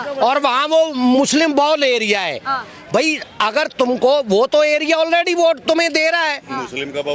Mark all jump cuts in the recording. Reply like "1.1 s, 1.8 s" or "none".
none